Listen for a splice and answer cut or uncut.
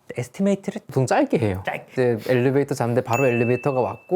cut